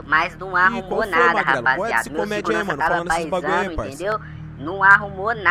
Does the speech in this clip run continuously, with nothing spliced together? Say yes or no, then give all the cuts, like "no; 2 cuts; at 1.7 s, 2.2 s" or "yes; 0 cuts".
yes; 0 cuts